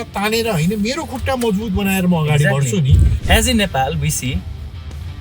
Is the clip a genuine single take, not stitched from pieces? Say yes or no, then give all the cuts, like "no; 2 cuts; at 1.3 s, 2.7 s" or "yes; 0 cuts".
no; 1 cut; at 3.1 s